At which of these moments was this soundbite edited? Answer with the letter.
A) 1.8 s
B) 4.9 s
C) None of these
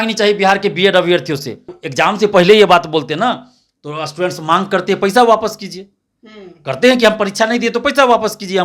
A